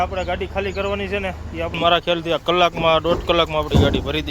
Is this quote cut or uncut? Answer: cut